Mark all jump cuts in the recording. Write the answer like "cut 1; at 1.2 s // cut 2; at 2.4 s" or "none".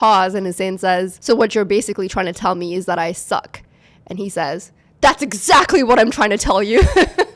none